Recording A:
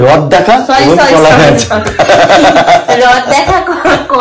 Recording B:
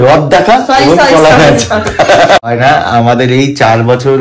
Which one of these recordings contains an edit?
B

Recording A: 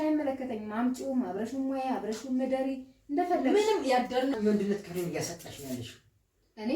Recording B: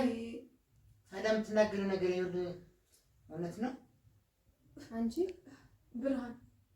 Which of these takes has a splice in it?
A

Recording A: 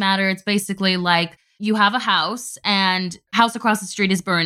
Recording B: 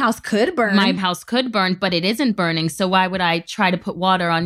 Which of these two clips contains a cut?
A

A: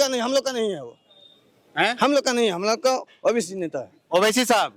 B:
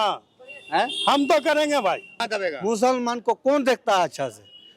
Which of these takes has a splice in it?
B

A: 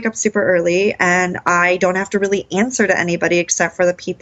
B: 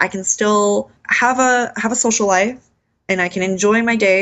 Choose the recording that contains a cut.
B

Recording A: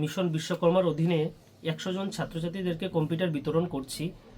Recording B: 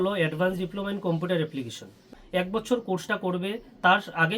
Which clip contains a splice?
B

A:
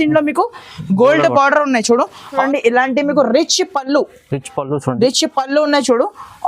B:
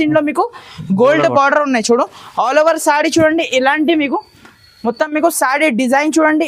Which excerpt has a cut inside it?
A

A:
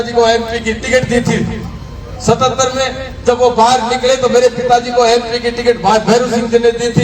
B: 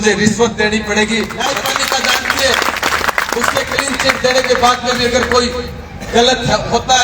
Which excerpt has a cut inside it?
B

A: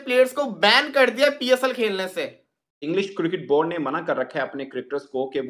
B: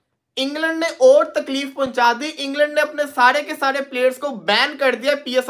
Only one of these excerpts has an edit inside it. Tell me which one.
A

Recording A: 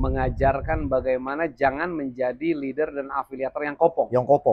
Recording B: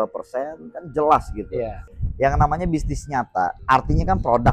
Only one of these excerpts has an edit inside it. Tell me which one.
B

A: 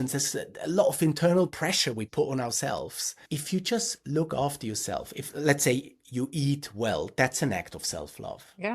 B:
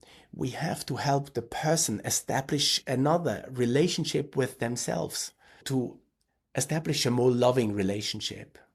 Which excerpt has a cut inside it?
A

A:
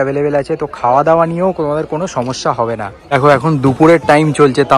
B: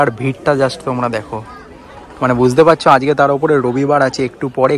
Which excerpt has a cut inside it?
A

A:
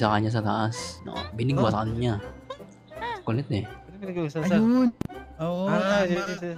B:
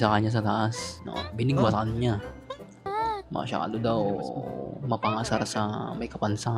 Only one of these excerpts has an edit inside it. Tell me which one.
B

